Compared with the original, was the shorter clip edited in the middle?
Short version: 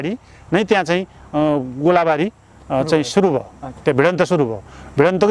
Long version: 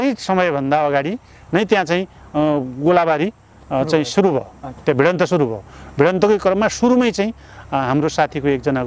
no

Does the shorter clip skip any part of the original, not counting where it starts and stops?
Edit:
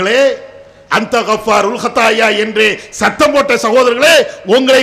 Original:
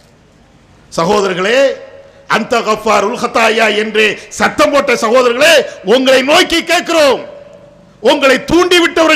no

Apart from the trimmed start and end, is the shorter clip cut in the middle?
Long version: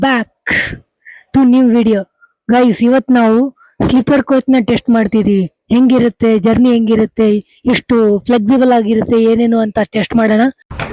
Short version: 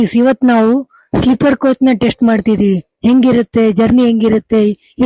no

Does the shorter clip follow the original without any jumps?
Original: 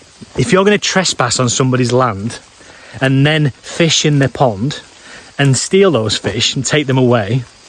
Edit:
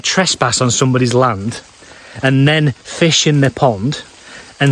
yes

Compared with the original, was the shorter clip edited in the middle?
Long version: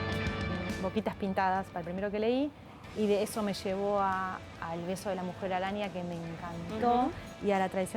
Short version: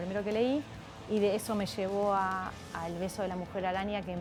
no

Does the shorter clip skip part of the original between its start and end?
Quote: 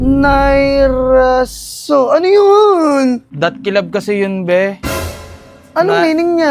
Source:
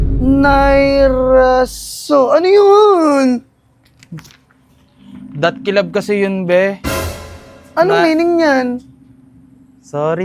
yes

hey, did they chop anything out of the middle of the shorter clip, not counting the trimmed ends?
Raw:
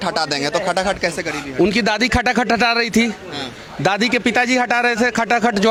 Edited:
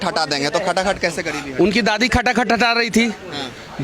no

